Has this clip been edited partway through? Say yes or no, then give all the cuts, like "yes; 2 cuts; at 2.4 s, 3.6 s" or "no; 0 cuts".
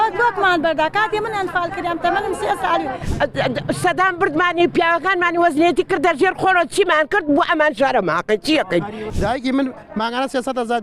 yes; 2 cuts; at 3.0 s, 9.0 s